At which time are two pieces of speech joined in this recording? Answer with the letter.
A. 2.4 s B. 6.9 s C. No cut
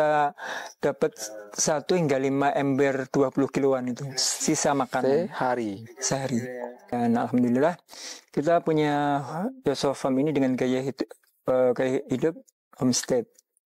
B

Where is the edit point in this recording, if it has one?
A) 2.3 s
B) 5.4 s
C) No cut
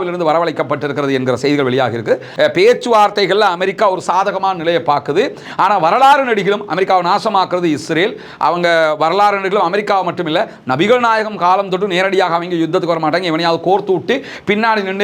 A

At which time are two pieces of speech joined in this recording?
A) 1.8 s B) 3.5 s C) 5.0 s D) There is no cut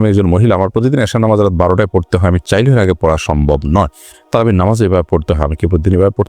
D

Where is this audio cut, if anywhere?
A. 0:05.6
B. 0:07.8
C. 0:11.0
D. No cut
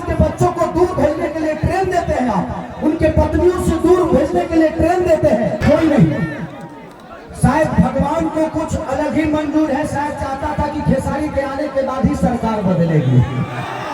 A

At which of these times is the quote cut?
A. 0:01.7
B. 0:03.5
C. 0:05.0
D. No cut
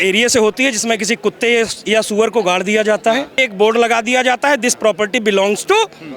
B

